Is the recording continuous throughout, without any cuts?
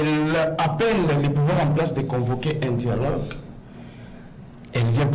yes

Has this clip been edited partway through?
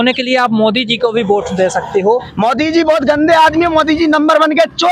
yes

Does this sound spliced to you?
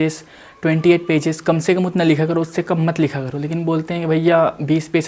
no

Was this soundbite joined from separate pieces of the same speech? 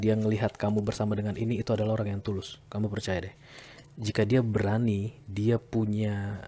no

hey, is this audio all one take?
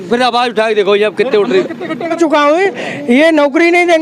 no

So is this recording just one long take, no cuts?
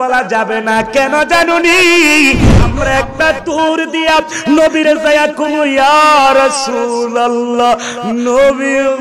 no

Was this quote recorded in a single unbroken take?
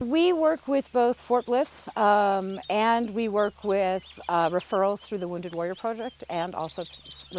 yes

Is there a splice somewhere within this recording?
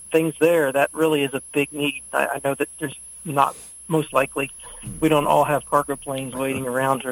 no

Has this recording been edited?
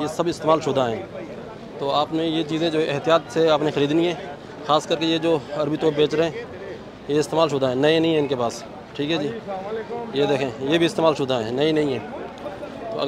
no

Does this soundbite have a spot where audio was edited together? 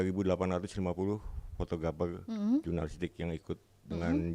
no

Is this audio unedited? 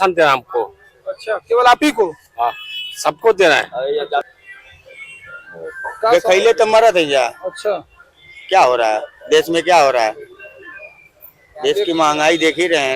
no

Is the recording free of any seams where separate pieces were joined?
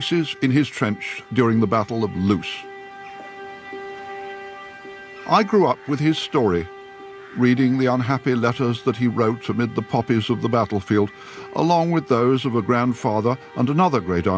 yes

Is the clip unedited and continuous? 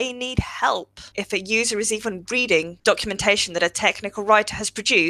no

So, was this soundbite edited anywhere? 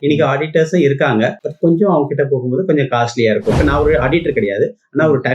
yes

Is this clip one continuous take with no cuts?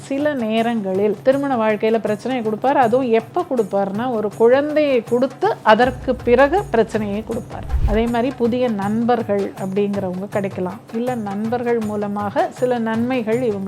no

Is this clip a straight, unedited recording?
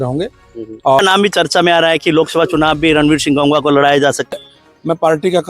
no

